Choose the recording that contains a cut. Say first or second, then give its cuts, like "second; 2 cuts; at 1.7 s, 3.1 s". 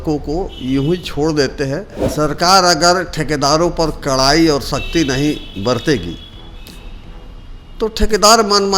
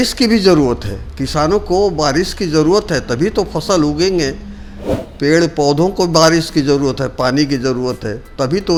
first; 1 cut; at 2.0 s